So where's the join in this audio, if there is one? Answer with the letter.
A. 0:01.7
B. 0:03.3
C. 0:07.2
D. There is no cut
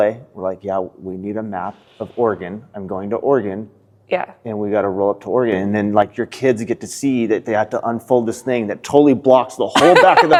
D